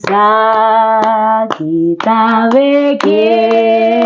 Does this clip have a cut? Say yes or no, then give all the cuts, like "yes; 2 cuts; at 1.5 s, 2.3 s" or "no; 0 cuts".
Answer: no; 0 cuts